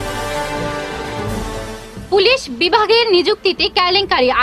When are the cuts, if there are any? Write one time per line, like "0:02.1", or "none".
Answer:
0:01.3